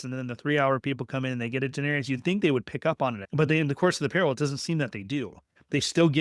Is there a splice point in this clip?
yes; 1 cut; at 3.2 s

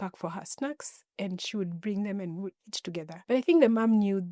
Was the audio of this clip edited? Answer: yes; 1 cut; at 3.1 s

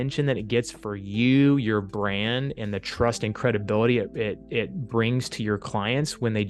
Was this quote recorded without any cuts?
yes; 0 cuts

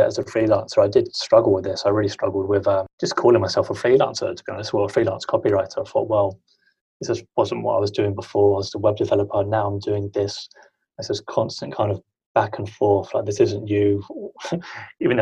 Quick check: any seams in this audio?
yes; 1 cut; at 2.9 s

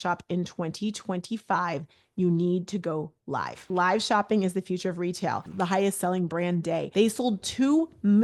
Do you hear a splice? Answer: yes; 3 cuts; at 3.6 s, 5.5 s, 6.9 s

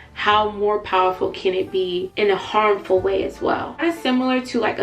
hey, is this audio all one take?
no; 2 cuts; at 2.1 s, 3.8 s

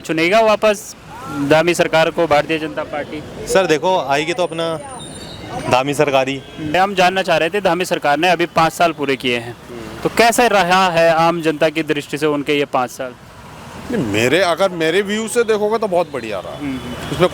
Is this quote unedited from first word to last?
no; 1 cut; at 6.7 s

